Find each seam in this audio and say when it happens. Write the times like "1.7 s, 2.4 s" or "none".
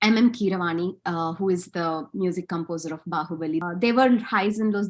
3.6 s

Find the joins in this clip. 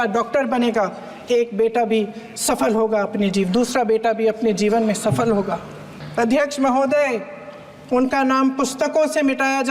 6.0 s

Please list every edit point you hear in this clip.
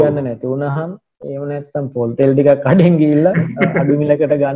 none

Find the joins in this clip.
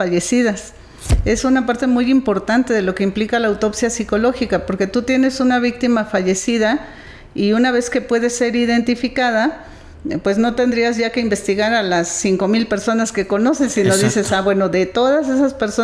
1.1 s

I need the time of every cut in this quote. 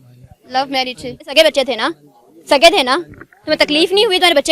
1.2 s

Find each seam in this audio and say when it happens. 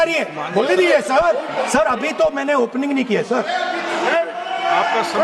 1.6 s

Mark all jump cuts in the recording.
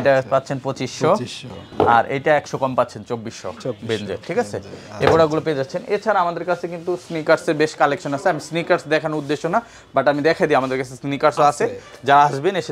none

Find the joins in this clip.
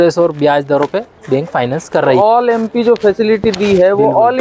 2.2 s

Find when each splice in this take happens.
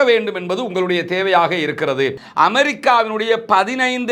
2.2 s

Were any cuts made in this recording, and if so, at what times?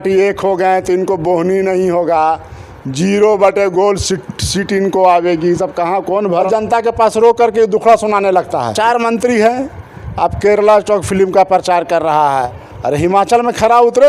6.5 s, 12.4 s

